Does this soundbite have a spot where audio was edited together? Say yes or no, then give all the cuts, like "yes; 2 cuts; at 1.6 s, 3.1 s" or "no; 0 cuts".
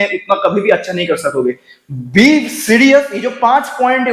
no; 0 cuts